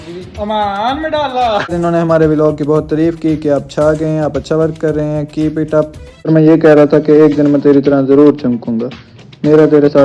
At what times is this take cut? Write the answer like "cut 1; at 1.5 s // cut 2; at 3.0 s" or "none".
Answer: cut 1; at 1.7 s // cut 2; at 6.3 s

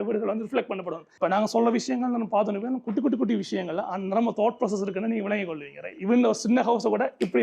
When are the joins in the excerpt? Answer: cut 1; at 1.0 s

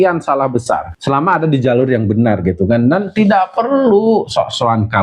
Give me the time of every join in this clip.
cut 1; at 0.9 s

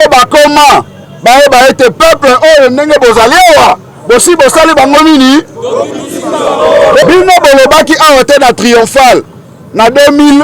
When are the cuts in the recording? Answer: cut 1; at 7.0 s

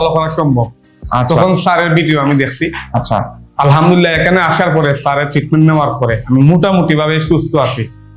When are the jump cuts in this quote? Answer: cut 1; at 2.9 s

